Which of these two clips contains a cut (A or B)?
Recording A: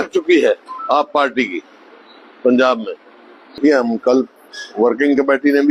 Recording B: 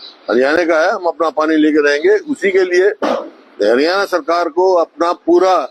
A